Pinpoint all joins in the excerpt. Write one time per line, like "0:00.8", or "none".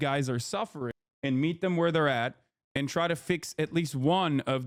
none

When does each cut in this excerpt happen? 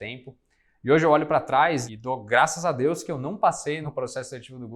0:01.9
0:03.8

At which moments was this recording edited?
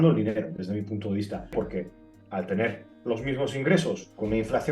0:01.5

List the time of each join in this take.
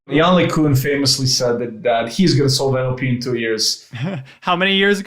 none

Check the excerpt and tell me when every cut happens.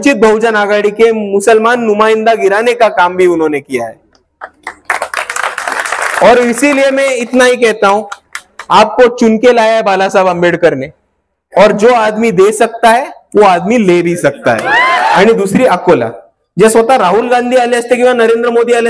0:15.1

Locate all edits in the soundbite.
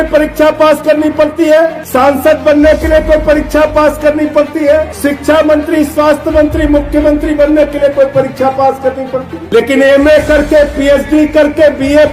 0:01.8
0:04.9
0:09.4

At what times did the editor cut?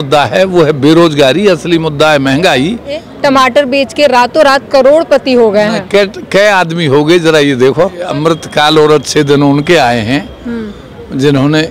0:03.1
0:08.1

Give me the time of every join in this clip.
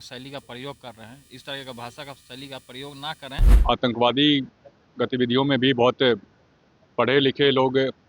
0:03.5

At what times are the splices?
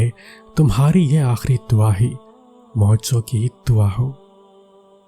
0:04.1

